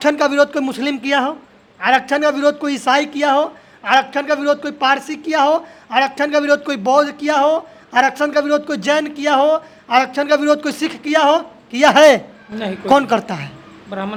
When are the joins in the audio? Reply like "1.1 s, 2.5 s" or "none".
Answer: none